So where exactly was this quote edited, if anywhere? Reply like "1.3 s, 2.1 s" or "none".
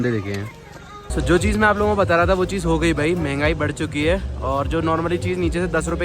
1.1 s